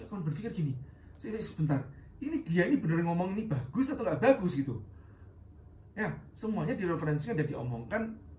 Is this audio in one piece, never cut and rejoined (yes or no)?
yes